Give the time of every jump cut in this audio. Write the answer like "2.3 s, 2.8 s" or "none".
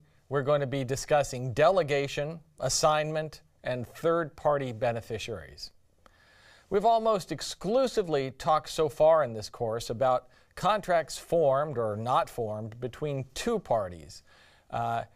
8.0 s